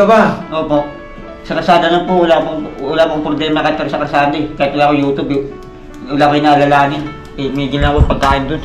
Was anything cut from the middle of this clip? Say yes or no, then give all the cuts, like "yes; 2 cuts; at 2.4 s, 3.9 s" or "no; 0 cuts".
no; 0 cuts